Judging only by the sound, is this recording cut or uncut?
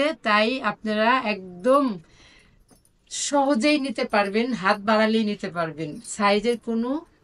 uncut